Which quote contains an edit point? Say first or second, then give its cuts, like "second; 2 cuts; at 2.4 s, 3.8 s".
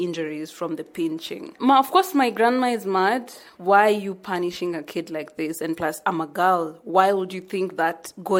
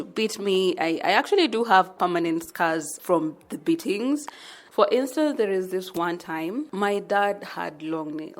second; 3 cuts; at 2.9 s, 4.5 s, 6.7 s